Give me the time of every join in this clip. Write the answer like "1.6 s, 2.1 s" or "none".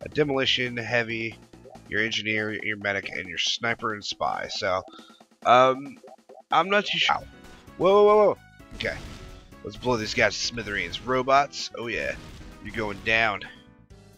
none